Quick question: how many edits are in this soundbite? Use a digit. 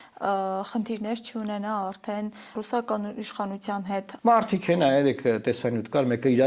2